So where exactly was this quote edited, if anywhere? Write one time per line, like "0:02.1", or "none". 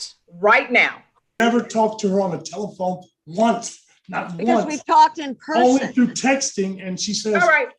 0:01.4